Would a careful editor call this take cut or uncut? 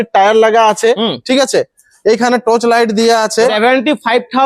cut